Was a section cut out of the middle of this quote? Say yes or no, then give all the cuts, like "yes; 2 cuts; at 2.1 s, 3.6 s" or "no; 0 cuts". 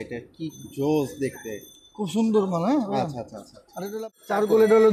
yes; 1 cut; at 3.8 s